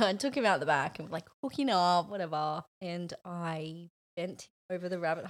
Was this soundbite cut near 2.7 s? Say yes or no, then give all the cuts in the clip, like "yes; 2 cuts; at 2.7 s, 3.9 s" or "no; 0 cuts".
yes; 1 cut; at 2.7 s